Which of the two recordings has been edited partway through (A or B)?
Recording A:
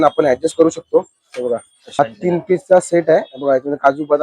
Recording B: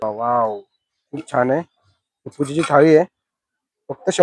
A